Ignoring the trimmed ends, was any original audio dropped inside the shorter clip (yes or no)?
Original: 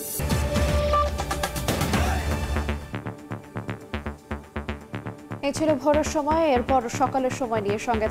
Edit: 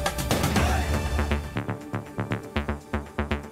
no